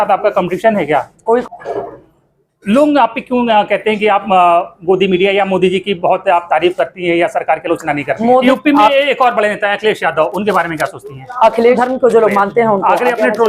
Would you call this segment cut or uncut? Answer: cut